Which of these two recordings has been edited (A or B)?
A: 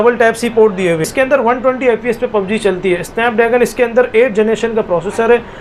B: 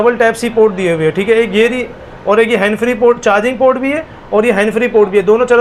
A